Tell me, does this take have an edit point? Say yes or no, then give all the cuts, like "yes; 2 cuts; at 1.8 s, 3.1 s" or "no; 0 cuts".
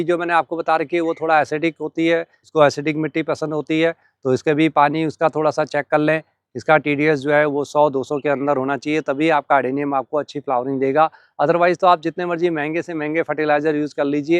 no; 0 cuts